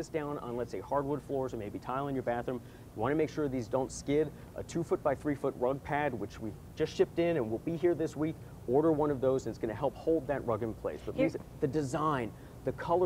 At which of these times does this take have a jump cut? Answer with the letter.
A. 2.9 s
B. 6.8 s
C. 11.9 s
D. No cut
D